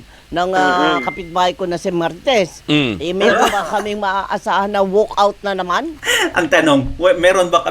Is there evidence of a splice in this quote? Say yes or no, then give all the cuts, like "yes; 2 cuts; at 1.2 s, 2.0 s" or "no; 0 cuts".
yes; 1 cut; at 6.0 s